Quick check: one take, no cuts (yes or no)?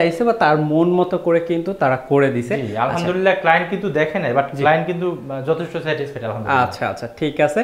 yes